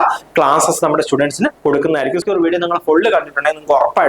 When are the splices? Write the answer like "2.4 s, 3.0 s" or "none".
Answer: 2.2 s